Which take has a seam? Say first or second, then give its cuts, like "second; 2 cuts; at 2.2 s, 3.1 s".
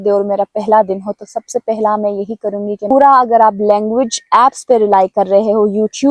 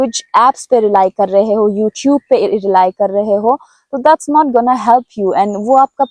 first; 1 cut; at 2.9 s